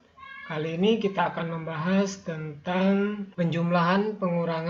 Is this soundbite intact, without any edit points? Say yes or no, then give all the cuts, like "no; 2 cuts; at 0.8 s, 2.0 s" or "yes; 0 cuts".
no; 1 cut; at 3.3 s